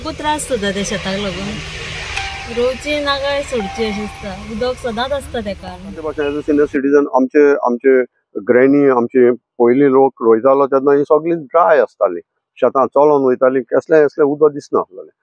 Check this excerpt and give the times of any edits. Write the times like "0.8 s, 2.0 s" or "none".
6.0 s